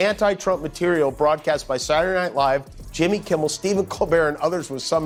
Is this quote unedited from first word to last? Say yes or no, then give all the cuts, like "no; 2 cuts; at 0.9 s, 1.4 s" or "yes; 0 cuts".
yes; 0 cuts